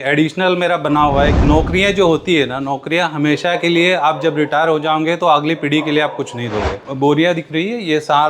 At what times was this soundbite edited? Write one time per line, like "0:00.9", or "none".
0:01.4
0:06.8